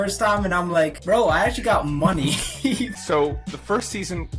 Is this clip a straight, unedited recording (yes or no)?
no